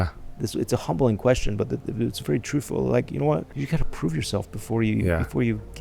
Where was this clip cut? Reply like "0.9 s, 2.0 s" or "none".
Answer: 3.5 s

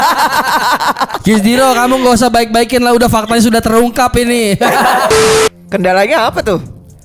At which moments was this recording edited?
1.1 s, 5.2 s

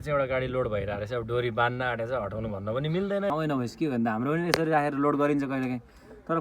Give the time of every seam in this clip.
3.3 s

